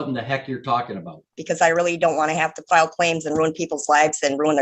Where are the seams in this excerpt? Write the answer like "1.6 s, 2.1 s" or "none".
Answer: 1.4 s